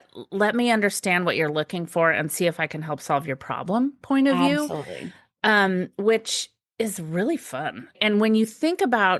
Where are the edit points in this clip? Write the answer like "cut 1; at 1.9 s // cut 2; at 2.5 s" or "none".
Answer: cut 1; at 8.0 s